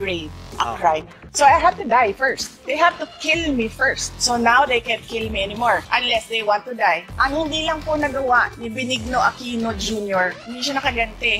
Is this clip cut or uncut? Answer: cut